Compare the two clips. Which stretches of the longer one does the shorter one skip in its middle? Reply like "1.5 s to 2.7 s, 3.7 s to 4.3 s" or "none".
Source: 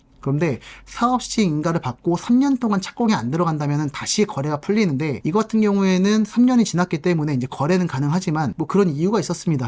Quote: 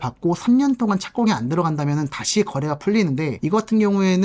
none